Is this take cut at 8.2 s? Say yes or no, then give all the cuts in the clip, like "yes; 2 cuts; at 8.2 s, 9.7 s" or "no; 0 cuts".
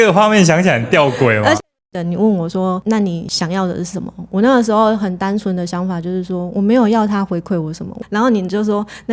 no; 2 cuts; at 1.6 s, 3.2 s